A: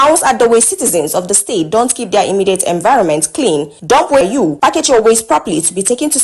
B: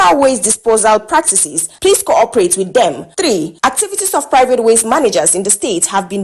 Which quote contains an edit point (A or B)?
A